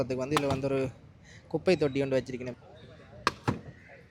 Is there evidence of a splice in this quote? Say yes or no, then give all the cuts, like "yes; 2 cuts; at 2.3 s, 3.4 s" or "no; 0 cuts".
yes; 1 cut; at 2.5 s